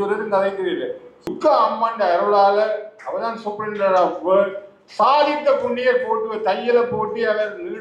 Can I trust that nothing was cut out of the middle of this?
no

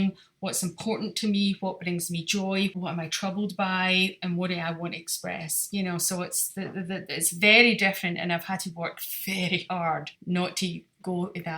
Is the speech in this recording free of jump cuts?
no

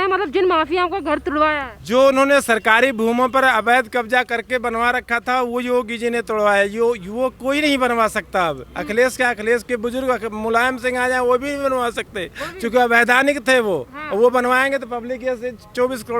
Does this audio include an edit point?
no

